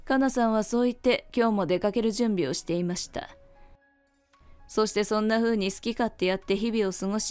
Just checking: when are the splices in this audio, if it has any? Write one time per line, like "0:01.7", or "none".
0:03.8